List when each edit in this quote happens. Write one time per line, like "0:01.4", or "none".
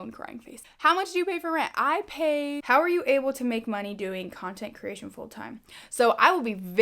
0:00.8
0:02.7